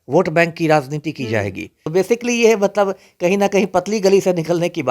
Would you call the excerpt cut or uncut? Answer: cut